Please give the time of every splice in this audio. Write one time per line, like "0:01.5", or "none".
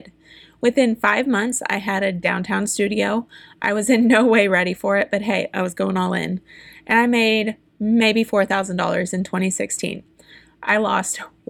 none